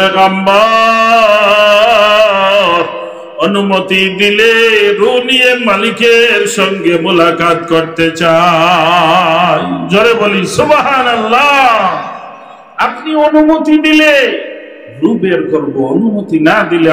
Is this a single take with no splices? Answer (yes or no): yes